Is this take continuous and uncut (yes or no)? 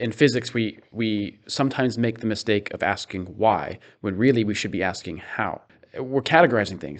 no